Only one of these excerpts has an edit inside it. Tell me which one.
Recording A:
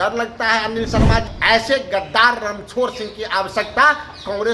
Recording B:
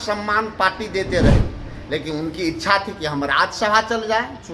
A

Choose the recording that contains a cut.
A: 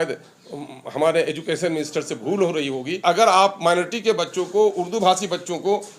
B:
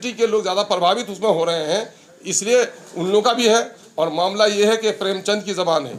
A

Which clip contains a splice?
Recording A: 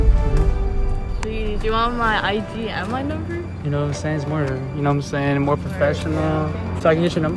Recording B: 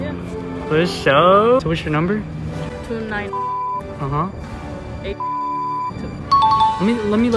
B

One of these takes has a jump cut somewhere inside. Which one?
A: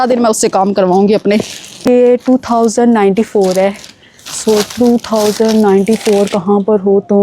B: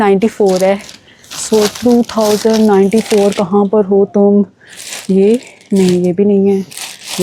A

